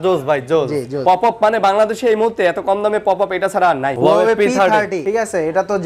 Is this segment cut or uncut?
cut